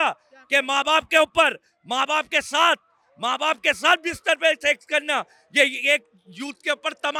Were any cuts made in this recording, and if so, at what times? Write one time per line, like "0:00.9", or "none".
none